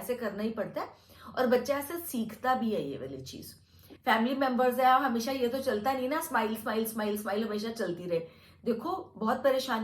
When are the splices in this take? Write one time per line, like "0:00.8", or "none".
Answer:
0:03.8